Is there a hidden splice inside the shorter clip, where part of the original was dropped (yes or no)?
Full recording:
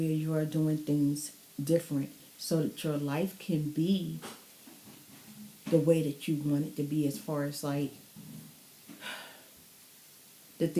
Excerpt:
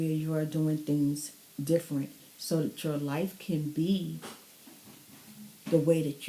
no